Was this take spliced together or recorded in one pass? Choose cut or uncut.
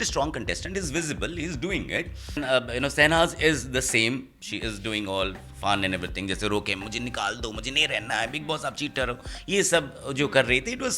cut